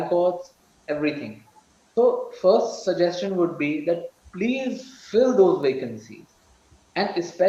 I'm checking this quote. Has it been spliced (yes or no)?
no